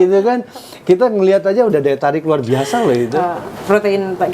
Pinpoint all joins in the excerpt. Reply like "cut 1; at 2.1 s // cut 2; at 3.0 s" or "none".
cut 1; at 3.2 s